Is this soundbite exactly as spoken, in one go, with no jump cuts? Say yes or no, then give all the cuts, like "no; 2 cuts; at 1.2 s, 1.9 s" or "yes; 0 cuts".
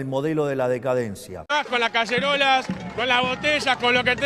no; 1 cut; at 1.3 s